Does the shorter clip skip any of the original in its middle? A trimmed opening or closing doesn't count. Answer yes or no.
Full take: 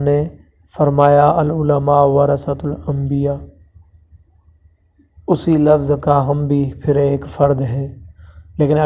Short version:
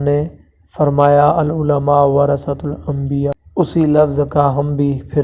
yes